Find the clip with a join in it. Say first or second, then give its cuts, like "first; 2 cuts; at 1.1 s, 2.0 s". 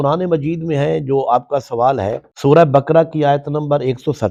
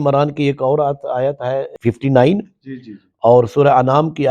second; 1 cut; at 1.7 s